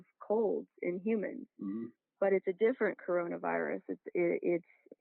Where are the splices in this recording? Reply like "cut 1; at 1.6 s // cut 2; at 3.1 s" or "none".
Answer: none